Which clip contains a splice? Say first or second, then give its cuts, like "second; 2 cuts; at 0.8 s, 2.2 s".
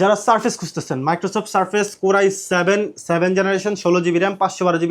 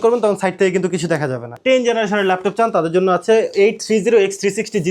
second; 1 cut; at 1.5 s